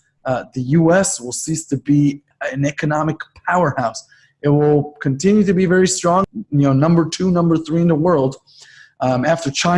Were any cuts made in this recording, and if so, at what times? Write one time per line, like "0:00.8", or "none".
0:02.3
0:06.2